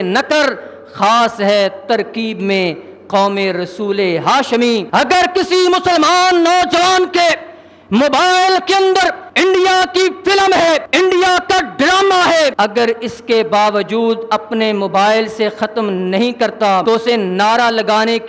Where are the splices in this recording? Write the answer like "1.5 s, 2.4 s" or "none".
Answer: 4.9 s, 9.2 s, 10.9 s, 12.5 s, 16.8 s

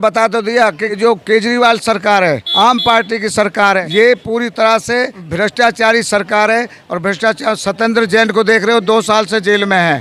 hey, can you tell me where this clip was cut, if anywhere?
1.0 s, 2.5 s, 3.8 s, 5.2 s

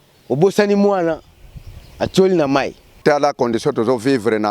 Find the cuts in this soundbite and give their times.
2.8 s

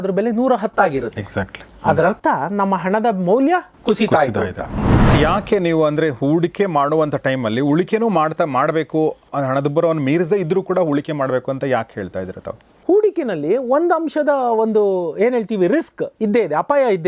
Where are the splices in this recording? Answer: 5.1 s, 9.3 s, 12.7 s

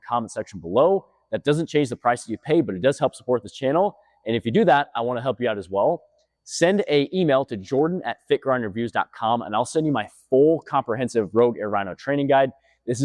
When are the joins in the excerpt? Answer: none

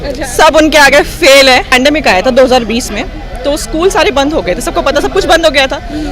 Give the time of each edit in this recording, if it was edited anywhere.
1.7 s

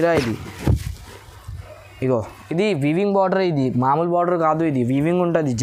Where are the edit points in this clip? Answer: none

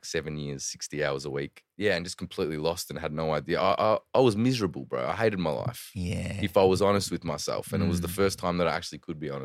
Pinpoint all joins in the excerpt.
1.6 s

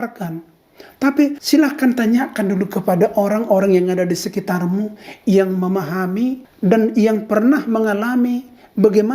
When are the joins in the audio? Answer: 1.4 s, 6.5 s

